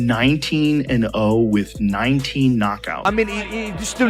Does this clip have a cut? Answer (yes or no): yes